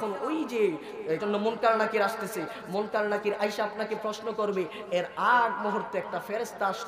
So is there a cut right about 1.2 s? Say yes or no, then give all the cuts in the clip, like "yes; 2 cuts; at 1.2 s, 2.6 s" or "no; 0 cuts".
yes; 1 cut; at 1.2 s